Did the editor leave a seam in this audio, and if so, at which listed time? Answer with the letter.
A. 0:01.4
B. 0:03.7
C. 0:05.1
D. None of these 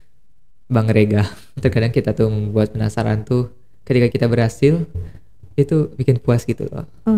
A